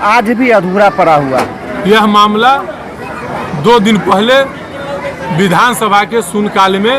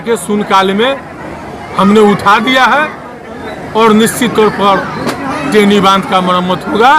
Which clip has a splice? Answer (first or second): first